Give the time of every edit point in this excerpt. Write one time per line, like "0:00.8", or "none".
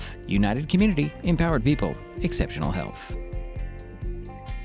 none